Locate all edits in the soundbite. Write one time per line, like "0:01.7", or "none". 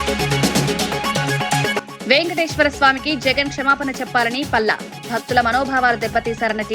0:01.3